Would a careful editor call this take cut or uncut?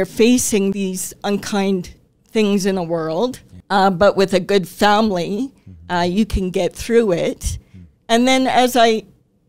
cut